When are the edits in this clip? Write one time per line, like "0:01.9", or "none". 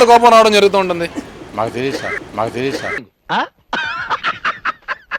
none